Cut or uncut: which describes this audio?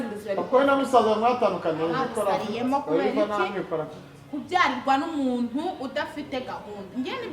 cut